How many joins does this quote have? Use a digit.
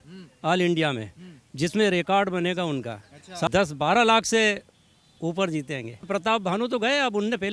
2